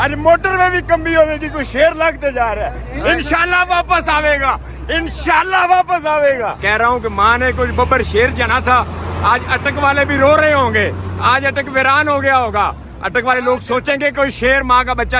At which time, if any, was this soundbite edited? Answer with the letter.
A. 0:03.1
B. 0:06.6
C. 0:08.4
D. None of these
B